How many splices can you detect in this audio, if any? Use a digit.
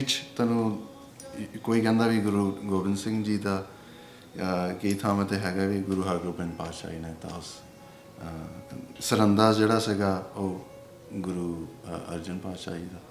1